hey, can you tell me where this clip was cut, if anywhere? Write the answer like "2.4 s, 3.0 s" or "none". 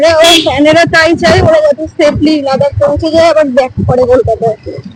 none